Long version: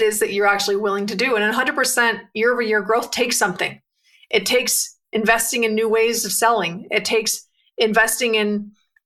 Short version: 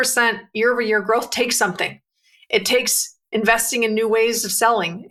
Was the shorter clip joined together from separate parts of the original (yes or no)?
no